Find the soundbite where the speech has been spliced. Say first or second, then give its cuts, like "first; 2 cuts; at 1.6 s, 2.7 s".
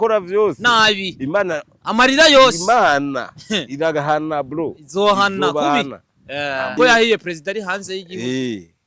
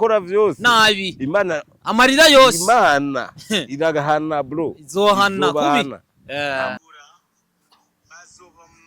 second; 1 cut; at 6.7 s